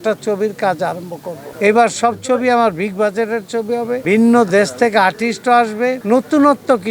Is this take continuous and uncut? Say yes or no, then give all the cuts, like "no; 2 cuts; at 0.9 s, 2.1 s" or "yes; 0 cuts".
yes; 0 cuts